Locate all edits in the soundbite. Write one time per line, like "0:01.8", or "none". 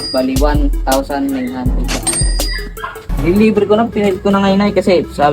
0:03.1